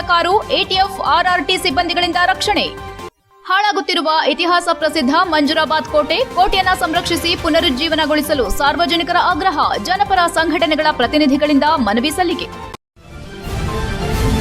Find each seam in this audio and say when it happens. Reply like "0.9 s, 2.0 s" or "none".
12.8 s